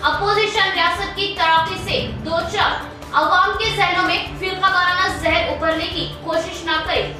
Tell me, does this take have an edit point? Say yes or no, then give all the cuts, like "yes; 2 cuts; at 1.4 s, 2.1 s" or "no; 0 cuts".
no; 0 cuts